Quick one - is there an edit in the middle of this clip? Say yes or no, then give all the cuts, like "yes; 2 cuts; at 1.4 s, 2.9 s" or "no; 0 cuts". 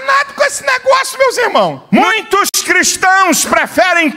yes; 1 cut; at 1.8 s